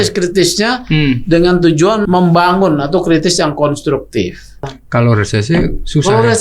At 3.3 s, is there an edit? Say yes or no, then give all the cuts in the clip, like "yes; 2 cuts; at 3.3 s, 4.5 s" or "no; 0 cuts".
no; 2 cuts; at 2.0 s, 4.6 s